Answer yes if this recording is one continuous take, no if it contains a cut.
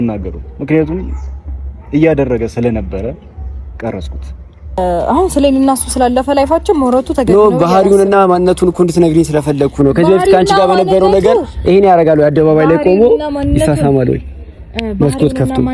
no